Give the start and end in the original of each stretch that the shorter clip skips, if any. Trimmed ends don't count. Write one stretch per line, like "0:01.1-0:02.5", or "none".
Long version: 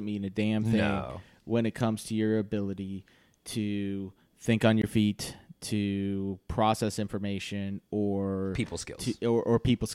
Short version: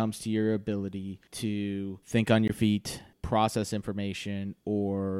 0:03.1-0:03.4
0:04.1-0:04.3
0:05.5-0:06.4